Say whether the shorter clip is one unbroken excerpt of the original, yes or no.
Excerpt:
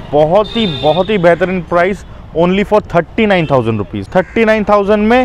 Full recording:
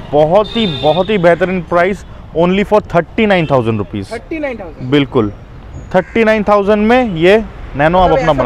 no